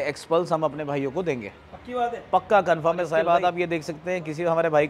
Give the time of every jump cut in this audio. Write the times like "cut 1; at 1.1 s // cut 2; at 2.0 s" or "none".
none